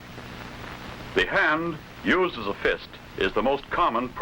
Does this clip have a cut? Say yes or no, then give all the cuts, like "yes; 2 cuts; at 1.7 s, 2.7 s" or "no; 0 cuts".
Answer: yes; 1 cut; at 1.1 s